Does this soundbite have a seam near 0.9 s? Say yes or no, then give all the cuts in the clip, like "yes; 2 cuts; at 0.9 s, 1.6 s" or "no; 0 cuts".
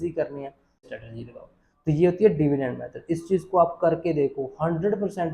yes; 1 cut; at 0.9 s